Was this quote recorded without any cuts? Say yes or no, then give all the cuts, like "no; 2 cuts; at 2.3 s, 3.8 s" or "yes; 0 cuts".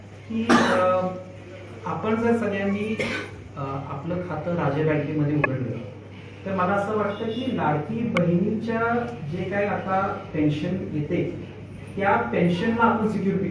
yes; 0 cuts